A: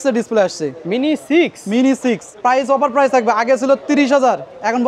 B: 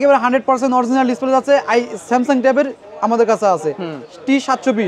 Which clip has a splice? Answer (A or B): A